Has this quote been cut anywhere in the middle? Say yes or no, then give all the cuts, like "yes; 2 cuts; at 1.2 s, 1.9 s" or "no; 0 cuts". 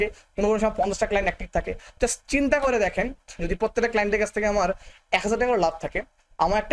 no; 0 cuts